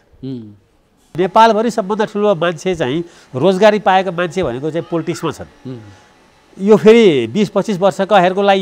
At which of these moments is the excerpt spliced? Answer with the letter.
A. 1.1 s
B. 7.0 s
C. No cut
A